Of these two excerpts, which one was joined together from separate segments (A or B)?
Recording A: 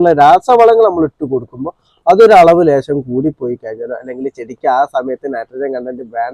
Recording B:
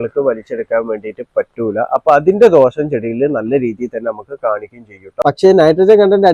B